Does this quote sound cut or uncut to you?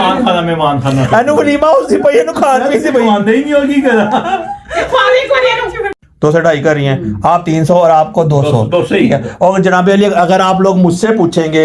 cut